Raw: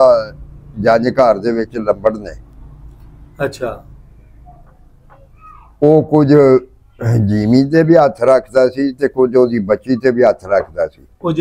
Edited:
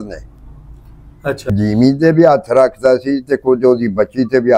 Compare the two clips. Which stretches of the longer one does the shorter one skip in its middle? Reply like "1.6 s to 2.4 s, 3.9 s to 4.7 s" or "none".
3.6 s to 7.2 s